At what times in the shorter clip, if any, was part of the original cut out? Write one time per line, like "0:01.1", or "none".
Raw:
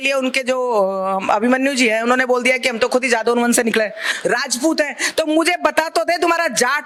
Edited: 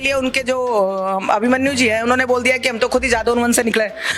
none